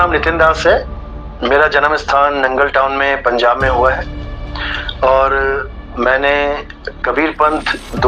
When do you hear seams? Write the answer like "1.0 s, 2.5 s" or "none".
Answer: none